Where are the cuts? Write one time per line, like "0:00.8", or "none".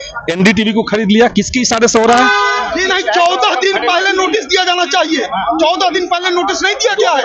0:02.7